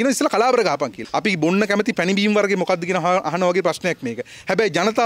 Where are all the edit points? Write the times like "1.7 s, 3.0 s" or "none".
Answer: 1.1 s